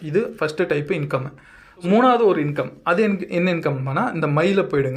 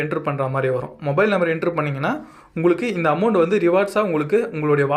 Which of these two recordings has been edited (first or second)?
first